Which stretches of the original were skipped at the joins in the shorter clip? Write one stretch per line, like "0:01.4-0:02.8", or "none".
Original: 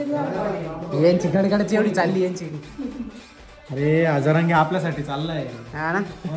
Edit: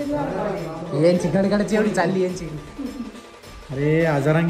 none